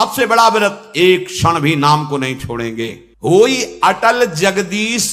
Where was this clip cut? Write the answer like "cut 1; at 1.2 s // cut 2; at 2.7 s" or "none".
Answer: none